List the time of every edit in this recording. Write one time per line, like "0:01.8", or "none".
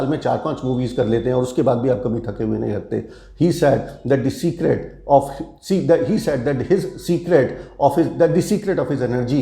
none